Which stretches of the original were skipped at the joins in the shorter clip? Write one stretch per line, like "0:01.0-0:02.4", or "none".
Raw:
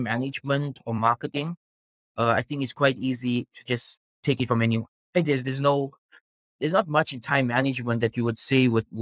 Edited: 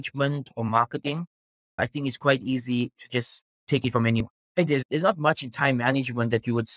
0:02.1-0:02.4
0:04.9-0:06.1